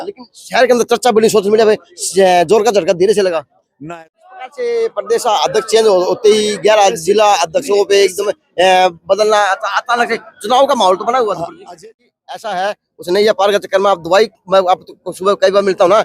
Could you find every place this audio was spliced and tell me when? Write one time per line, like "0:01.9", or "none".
0:03.8
0:11.8